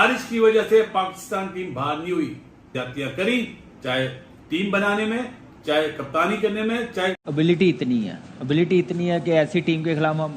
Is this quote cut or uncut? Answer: cut